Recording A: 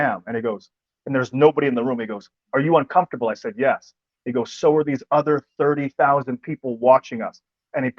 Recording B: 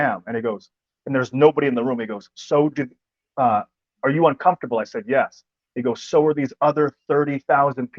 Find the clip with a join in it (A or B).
A